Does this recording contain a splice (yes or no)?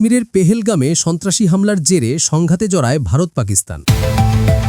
yes